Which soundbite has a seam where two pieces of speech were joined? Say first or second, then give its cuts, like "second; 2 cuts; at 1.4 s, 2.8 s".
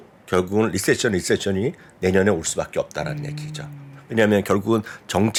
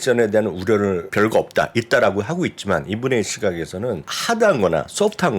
second; 2 cuts; at 1.1 s, 4.1 s